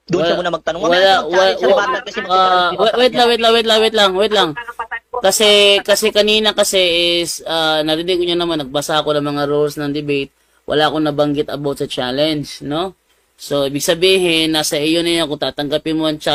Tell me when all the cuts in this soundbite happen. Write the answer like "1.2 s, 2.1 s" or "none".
none